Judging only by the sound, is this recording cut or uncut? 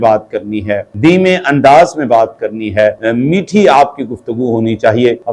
uncut